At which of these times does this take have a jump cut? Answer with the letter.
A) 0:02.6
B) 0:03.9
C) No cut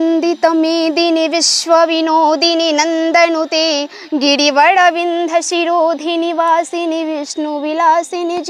C